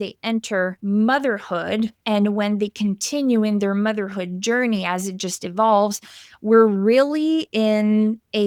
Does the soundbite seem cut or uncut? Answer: uncut